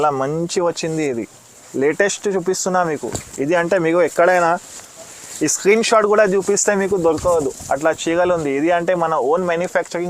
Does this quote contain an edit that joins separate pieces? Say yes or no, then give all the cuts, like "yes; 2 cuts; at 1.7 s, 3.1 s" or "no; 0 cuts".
no; 0 cuts